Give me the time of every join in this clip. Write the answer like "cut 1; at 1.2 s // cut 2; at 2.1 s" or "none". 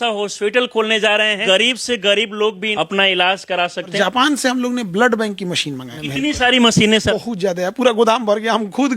cut 1; at 1.4 s // cut 2; at 2.6 s // cut 3; at 3.9 s // cut 4; at 5.9 s // cut 5; at 7.1 s